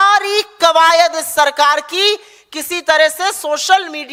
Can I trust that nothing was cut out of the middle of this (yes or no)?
yes